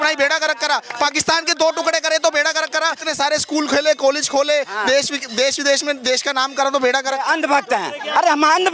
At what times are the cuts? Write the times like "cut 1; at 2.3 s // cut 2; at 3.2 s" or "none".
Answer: cut 1; at 3.0 s // cut 2; at 7.2 s